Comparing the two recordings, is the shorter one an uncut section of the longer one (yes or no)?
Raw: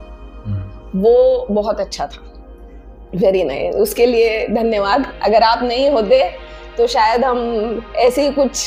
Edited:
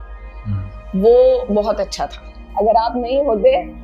no